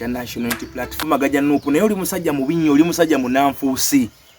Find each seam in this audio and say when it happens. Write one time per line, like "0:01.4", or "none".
0:01.0